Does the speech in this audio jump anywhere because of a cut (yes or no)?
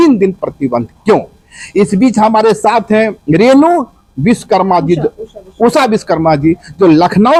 no